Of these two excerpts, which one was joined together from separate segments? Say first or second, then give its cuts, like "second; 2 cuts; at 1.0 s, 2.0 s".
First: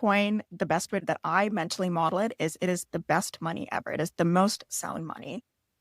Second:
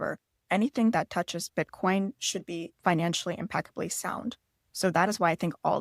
first; 1 cut; at 1.0 s